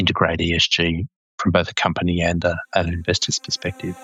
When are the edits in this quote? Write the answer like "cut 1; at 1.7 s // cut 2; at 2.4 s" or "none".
none